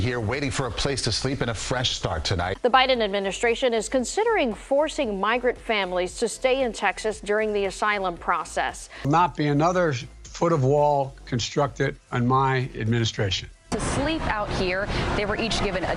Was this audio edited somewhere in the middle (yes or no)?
no